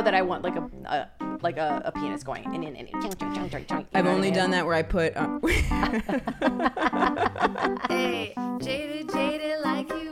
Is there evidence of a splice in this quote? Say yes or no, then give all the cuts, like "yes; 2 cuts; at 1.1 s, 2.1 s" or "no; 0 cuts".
yes; 1 cut; at 7.8 s